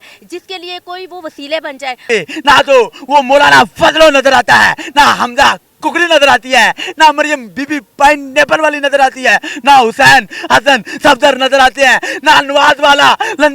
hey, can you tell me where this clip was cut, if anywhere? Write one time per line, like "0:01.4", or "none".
0:02.0